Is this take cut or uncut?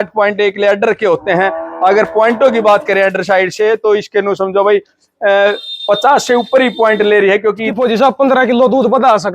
cut